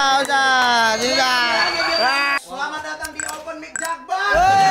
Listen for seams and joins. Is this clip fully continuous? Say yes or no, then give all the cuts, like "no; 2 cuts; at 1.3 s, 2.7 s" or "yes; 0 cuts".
no; 1 cut; at 2.4 s